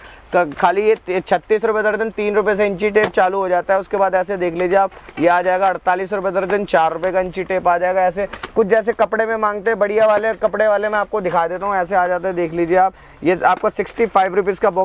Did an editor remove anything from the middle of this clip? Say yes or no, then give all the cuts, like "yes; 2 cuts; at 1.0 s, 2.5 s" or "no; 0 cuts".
no; 0 cuts